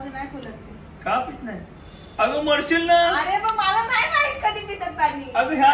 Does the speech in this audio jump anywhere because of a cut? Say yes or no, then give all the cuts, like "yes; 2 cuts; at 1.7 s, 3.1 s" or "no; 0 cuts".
no; 0 cuts